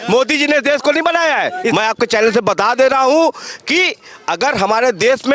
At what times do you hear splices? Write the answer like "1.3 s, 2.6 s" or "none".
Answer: 1.7 s

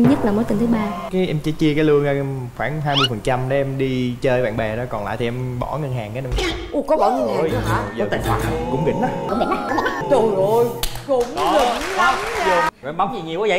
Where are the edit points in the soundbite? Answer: 1.0 s, 12.7 s

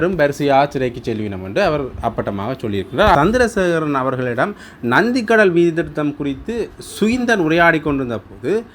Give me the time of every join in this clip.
3.2 s

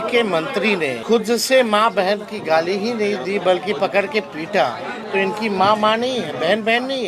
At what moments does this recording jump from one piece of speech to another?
1.0 s, 4.9 s

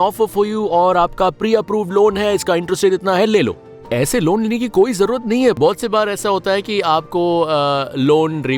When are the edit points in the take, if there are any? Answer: 5.6 s

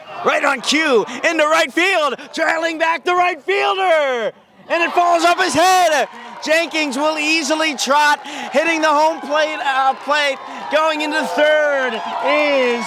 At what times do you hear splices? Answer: none

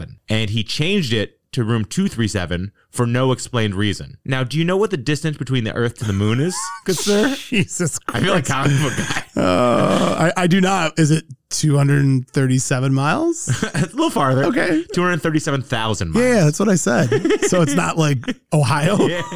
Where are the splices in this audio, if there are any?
none

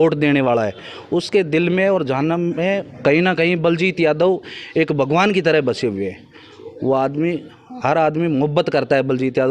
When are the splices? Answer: none

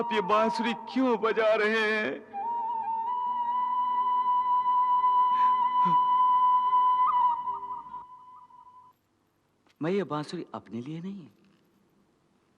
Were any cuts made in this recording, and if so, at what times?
8.9 s

